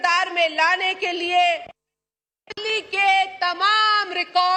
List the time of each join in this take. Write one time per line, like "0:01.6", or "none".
none